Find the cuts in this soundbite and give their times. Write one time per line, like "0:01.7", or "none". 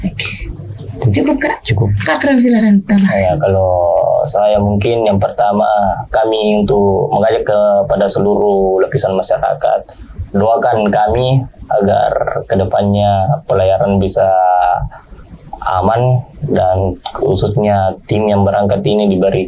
none